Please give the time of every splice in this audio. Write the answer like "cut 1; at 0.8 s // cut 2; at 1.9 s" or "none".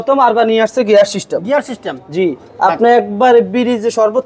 none